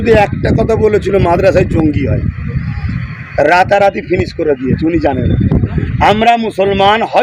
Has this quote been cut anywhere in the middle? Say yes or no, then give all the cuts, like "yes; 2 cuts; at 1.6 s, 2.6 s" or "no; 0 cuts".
no; 0 cuts